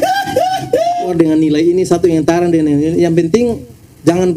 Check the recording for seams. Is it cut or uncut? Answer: cut